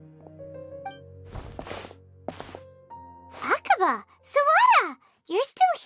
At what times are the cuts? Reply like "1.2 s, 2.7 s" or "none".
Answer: 1.1 s